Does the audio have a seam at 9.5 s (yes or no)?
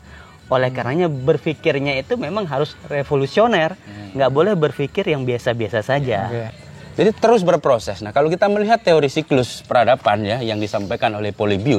no